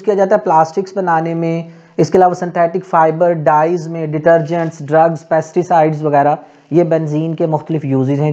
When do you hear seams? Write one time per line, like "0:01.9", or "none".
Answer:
none